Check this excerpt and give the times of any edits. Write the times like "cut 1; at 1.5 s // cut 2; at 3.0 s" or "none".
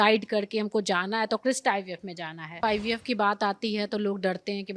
cut 1; at 2.6 s

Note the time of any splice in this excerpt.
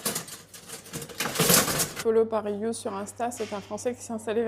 cut 1; at 1.9 s

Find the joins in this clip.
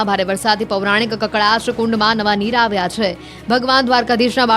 cut 1; at 1.1 s

